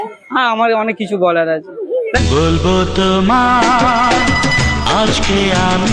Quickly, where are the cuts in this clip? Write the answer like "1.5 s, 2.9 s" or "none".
none